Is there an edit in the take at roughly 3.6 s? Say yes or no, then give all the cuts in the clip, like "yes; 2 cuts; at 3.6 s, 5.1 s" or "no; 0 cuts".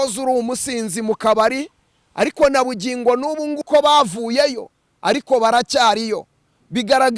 yes; 1 cut; at 3.6 s